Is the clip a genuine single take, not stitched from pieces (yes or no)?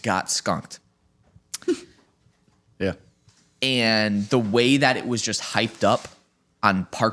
yes